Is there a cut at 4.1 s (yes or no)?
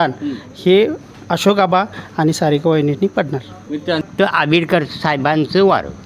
yes